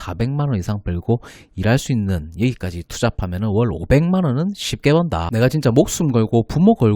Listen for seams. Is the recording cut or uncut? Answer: cut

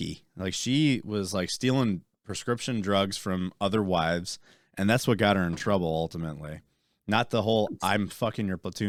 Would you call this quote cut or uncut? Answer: uncut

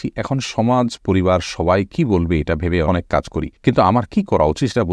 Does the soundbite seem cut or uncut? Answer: cut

